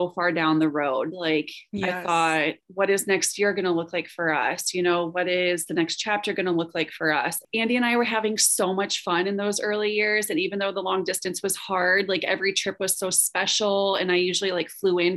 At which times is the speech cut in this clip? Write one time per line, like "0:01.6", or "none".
0:07.4